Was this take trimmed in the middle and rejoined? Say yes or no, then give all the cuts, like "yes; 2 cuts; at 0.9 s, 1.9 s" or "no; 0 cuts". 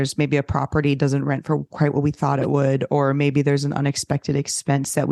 no; 0 cuts